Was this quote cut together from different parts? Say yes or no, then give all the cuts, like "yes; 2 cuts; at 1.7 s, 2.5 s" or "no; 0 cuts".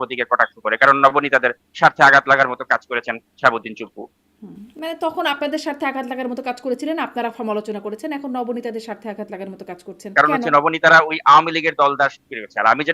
yes; 1 cut; at 10.1 s